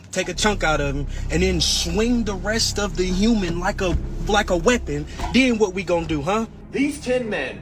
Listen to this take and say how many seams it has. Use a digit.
1